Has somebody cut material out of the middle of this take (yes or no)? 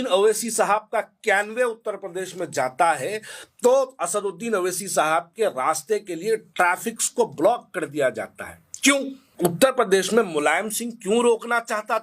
yes